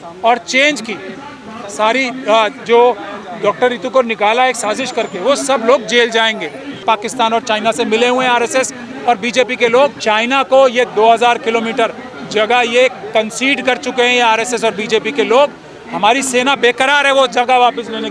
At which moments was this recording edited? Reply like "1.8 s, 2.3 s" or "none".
6.8 s, 10.0 s

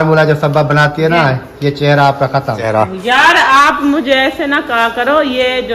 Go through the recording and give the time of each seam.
2.7 s

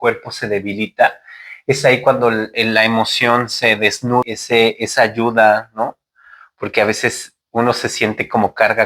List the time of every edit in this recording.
4.2 s

